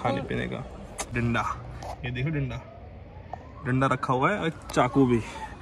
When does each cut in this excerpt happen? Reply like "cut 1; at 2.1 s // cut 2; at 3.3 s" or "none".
none